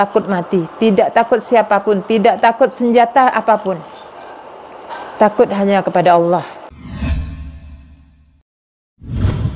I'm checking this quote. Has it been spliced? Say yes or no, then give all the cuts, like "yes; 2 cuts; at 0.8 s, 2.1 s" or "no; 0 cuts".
yes; 1 cut; at 6.7 s